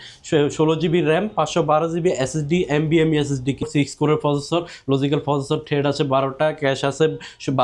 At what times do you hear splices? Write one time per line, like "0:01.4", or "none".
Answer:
0:03.7